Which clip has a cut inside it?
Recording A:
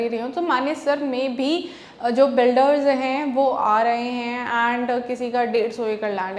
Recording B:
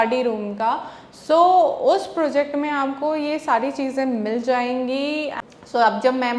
B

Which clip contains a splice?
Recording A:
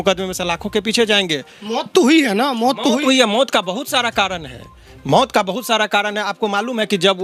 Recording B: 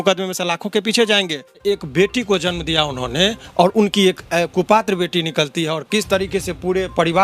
B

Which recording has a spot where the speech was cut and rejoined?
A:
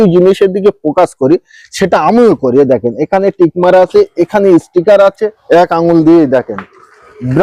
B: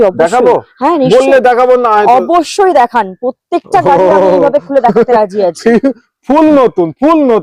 A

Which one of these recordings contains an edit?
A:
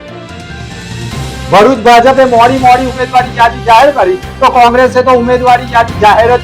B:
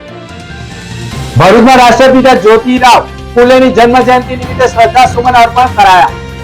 A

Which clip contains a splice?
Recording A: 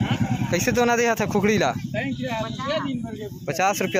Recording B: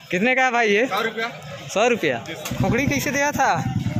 B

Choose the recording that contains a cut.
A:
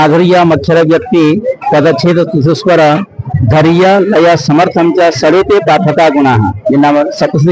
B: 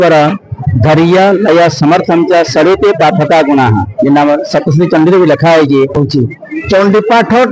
B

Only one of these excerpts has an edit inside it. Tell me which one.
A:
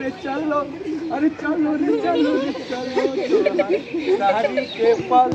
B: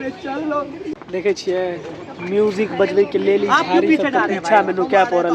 B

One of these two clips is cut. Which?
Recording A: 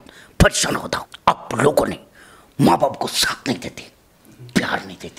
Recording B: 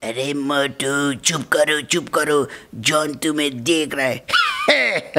A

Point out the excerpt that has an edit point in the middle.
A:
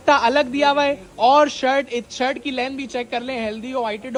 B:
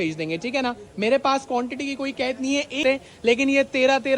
B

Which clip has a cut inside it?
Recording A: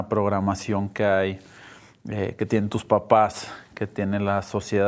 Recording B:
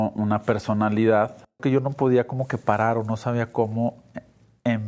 B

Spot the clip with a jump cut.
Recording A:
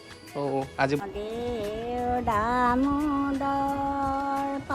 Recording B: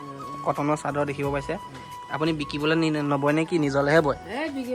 A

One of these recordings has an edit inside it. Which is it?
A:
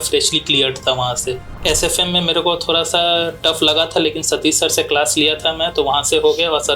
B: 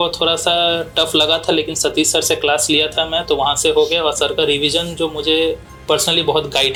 A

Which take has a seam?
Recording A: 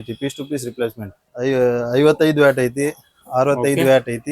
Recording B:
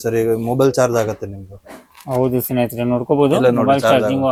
A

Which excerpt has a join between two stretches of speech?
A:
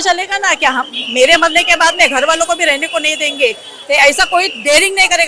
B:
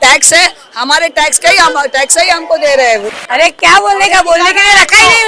B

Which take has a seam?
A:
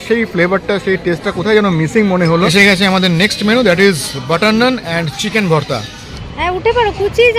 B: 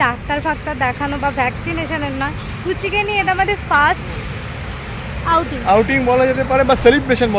A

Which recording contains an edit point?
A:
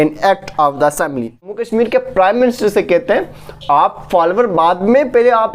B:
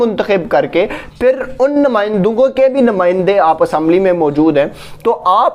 A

